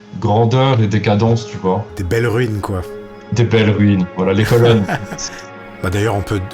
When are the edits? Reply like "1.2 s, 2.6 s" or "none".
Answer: 1.9 s, 5.6 s